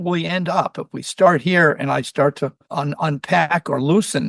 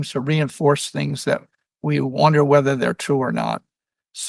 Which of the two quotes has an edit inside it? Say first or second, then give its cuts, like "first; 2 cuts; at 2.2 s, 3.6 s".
first; 1 cut; at 2.6 s